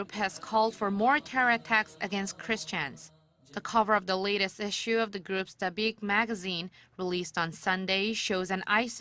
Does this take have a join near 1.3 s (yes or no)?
no